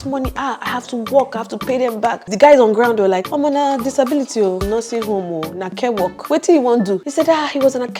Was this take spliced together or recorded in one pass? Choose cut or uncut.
cut